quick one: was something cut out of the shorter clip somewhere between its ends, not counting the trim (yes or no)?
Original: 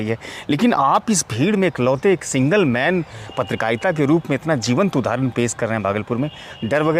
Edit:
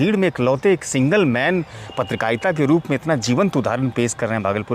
no